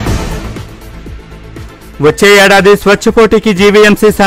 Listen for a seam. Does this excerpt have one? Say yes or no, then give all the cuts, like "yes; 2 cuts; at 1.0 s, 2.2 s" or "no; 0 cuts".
yes; 1 cut; at 1.8 s